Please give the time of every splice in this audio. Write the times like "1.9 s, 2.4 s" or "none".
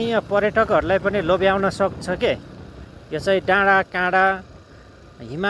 none